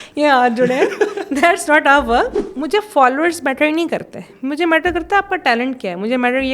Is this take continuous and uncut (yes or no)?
no